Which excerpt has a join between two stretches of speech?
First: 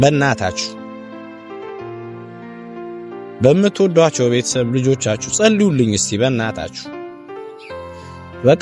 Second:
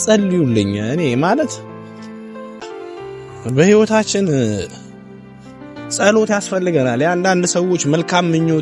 second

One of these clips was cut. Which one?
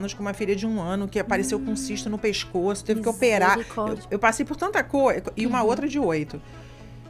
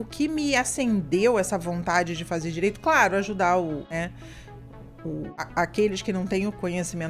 second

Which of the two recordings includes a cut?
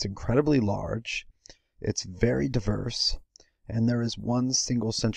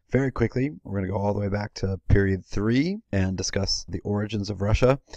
second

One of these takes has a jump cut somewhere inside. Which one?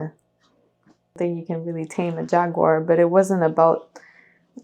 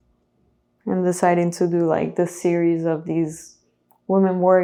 first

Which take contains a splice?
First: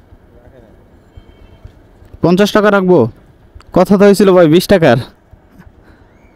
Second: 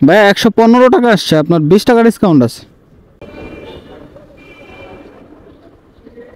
second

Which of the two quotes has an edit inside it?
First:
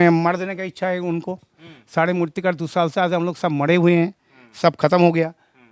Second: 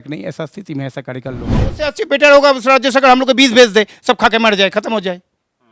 second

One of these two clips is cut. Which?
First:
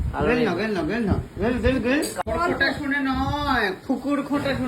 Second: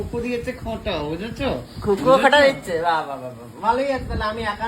first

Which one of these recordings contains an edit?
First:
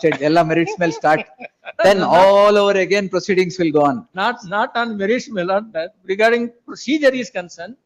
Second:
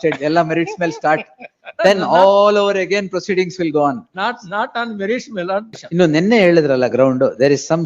second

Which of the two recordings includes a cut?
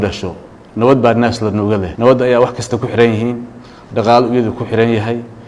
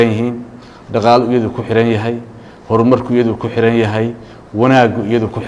first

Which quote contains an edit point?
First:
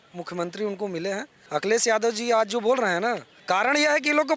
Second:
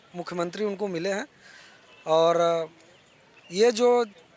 first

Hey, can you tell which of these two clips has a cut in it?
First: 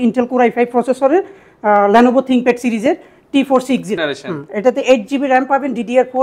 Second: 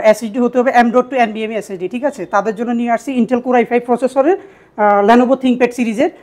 first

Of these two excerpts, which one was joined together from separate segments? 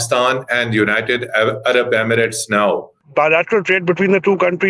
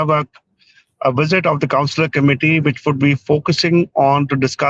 first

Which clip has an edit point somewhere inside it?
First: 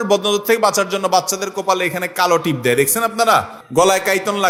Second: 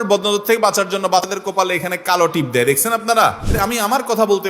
second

